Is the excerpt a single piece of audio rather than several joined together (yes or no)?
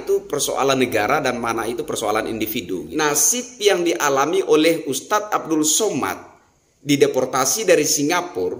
no